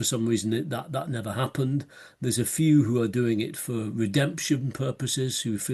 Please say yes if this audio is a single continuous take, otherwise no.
yes